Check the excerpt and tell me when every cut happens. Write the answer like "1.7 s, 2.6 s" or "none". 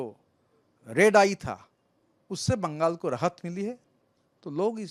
none